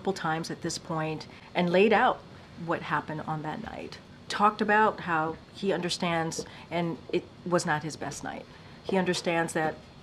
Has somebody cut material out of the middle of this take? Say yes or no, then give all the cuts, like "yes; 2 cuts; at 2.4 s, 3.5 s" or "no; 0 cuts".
no; 0 cuts